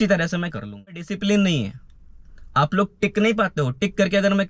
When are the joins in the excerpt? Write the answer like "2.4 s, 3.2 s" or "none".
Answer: 1.1 s